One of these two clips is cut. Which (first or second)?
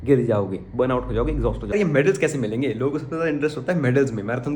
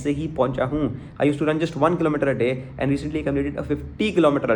first